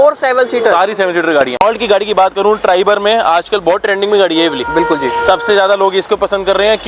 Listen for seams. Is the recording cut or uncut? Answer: uncut